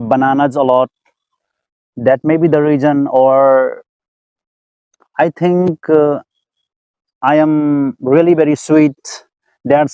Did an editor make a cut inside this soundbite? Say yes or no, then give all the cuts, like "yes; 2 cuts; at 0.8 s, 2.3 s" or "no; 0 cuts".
no; 0 cuts